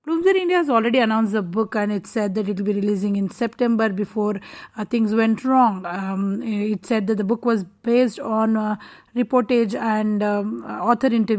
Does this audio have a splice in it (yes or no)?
no